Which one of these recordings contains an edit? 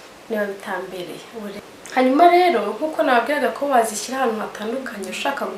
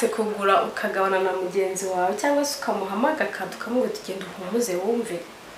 first; 1 cut; at 1.5 s

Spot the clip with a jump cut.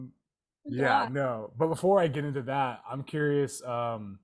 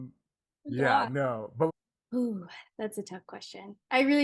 second; 1 cut; at 1.7 s

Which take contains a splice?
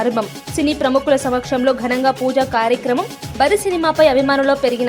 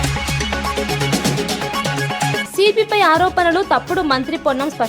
second; 1 cut; at 2.4 s

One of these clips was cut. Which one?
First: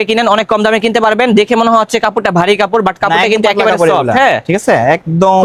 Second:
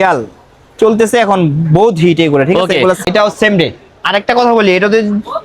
second; 1 cut; at 3.1 s

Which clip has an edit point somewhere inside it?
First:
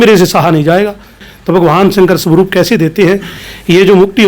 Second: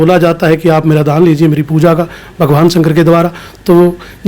first; 1 cut; at 1.3 s

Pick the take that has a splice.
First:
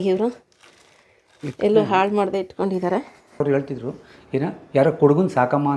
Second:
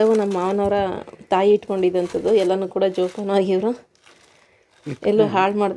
first; 1 cut; at 3.4 s

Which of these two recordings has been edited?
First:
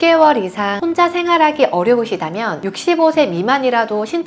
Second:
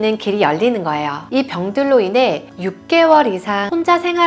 second; 1 cut; at 1.2 s

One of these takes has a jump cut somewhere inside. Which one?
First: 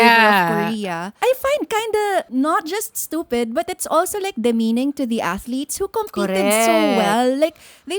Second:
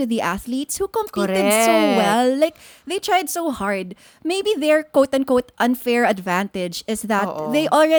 first; 2 cuts; at 1.2 s, 2.3 s

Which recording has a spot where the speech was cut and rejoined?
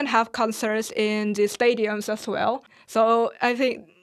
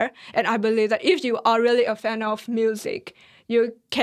first; 1 cut; at 2.7 s

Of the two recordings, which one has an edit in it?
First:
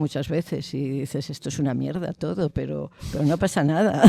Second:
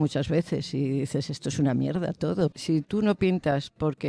second; 1 cut; at 2.5 s

